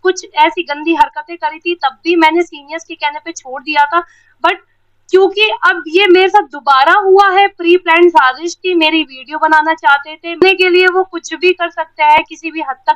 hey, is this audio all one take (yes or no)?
no